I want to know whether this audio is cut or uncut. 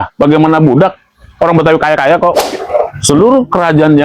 cut